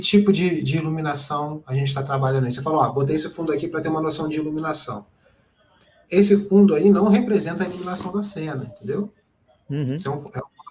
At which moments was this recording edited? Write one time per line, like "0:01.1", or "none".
none